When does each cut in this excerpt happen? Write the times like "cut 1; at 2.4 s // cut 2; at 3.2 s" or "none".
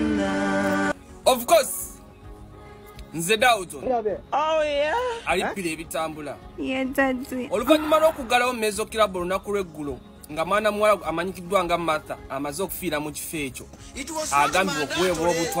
none